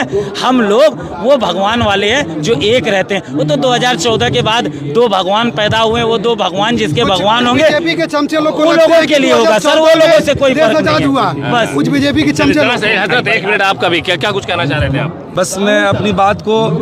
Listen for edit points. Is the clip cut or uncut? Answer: cut